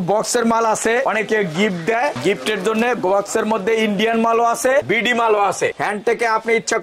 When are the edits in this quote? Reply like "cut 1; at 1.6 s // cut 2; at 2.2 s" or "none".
cut 1; at 5.8 s